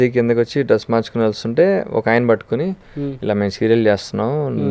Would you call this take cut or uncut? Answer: uncut